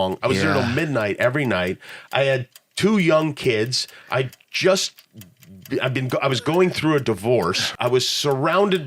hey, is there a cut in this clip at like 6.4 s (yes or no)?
no